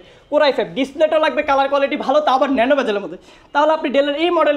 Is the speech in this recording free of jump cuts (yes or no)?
yes